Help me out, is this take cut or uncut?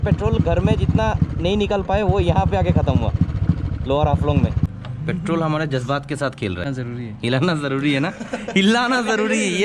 cut